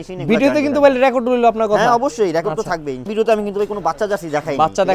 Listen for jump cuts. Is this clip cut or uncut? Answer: cut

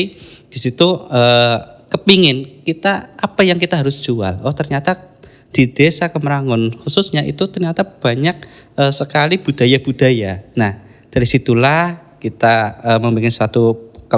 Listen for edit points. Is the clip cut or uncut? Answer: uncut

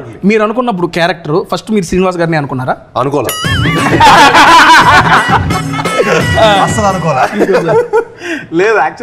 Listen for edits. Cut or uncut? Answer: uncut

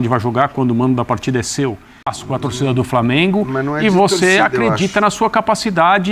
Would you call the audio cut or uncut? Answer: cut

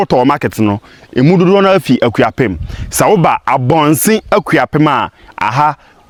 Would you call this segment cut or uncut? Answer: uncut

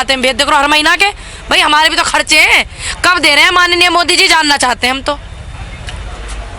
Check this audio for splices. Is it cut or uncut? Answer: uncut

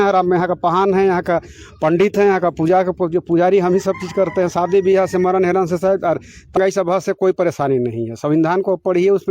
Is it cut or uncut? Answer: cut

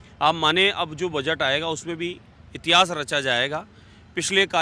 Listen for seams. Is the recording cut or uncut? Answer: uncut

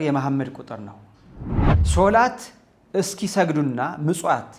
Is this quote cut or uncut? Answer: cut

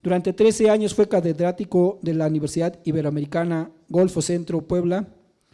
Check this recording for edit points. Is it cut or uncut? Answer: uncut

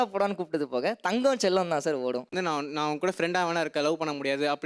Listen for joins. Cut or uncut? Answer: cut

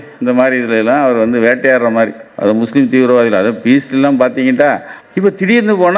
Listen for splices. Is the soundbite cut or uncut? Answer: cut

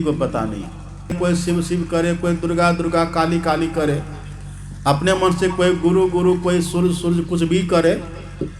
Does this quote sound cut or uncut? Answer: cut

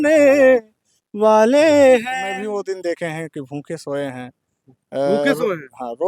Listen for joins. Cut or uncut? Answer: cut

